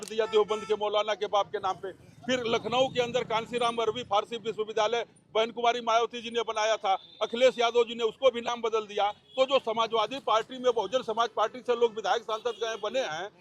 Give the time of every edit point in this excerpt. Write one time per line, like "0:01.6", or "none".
none